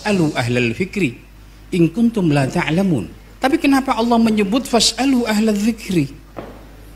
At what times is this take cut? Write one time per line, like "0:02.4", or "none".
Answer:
0:03.2